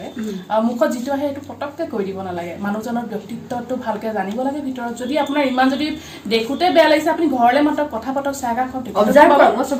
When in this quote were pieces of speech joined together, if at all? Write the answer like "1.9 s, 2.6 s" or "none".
none